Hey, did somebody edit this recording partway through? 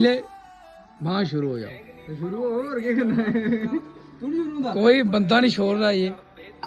no; 0 cuts

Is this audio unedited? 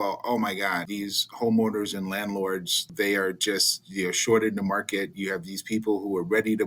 no; 2 cuts; at 0.8 s, 2.9 s

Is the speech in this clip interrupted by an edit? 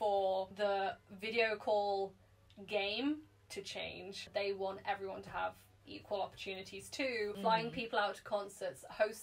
yes; 2 cuts; at 4.3 s, 7.4 s

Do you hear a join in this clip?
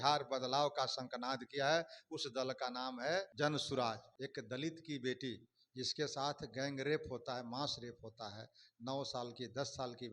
yes; 2 cuts; at 3.3 s, 4.1 s

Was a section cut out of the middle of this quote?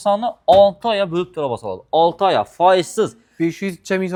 no; 0 cuts

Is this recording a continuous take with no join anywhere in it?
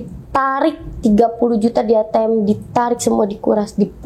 yes; 0 cuts

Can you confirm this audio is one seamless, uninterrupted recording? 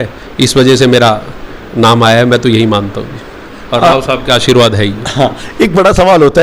yes; 0 cuts

